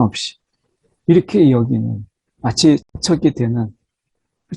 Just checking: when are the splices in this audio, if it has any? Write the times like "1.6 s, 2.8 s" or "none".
2.9 s